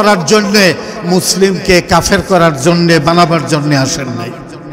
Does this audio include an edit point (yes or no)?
no